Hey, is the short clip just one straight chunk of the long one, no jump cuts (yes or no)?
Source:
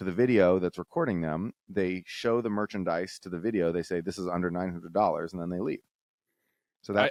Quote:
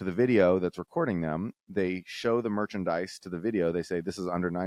yes